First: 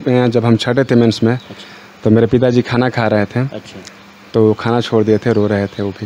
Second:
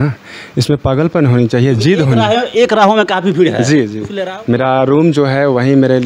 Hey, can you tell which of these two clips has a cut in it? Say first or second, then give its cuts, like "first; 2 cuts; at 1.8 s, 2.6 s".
second; 1 cut; at 4.0 s